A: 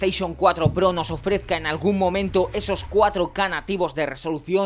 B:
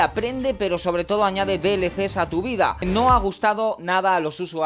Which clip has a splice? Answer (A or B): B